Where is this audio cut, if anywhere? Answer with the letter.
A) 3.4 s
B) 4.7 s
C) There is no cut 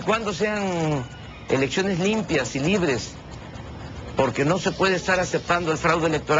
B